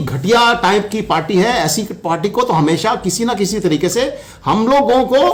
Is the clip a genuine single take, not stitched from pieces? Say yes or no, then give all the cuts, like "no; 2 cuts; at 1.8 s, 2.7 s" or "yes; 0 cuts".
yes; 0 cuts